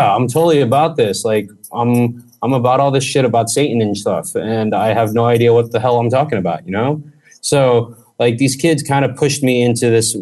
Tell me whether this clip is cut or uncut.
uncut